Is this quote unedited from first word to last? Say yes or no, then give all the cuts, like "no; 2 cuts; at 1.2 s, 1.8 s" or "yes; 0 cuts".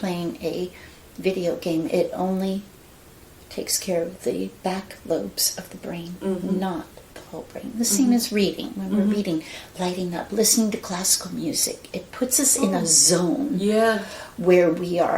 yes; 0 cuts